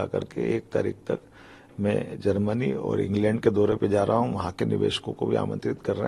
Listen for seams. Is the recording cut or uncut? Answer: uncut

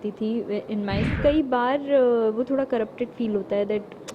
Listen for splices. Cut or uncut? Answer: cut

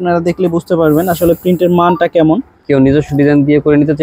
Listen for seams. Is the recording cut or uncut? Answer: cut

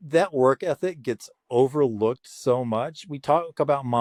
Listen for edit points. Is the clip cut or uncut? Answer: uncut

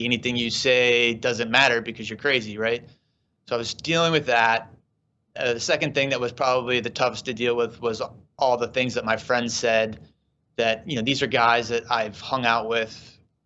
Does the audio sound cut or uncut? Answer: uncut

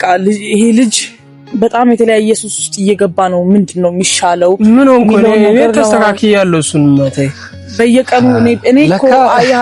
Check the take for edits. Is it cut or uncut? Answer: uncut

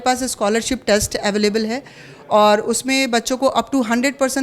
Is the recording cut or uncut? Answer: uncut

